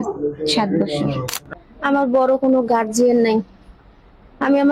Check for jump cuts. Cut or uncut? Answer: cut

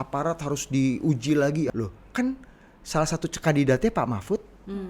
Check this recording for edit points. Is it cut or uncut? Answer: cut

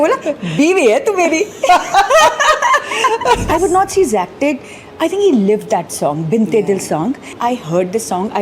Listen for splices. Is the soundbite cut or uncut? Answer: cut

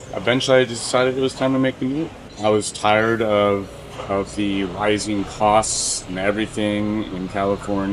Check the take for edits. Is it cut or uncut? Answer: cut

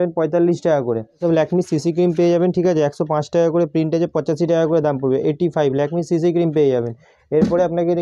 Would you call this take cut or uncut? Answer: uncut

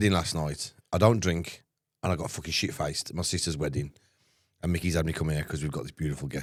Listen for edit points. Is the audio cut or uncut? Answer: uncut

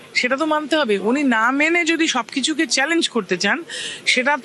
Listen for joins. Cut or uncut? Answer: uncut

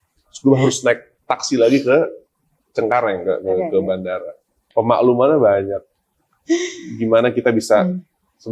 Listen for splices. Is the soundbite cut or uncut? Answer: cut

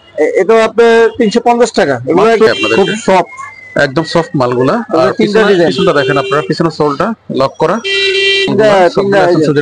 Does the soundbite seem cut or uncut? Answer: cut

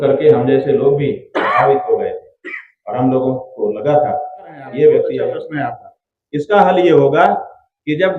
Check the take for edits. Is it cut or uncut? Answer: cut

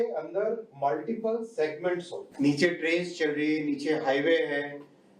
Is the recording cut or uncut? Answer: cut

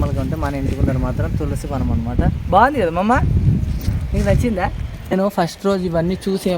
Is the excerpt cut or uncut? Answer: cut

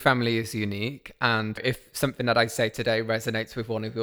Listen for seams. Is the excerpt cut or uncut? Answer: cut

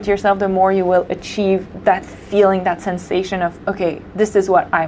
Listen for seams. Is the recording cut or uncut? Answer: cut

